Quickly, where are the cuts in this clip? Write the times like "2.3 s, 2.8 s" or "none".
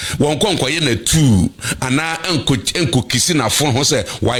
none